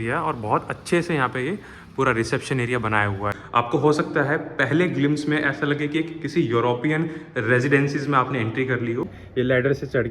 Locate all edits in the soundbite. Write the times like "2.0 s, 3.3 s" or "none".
3.4 s, 9.2 s